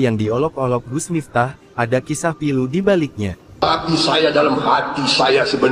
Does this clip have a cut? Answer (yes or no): yes